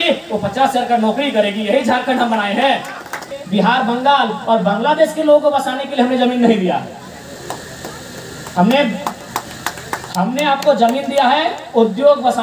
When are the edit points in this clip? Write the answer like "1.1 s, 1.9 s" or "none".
3.4 s